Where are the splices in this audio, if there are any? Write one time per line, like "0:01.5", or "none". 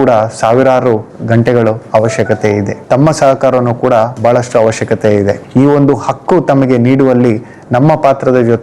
0:02.7
0:05.4